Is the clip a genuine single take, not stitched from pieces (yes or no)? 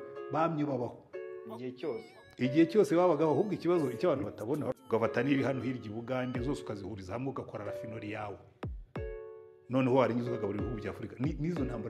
no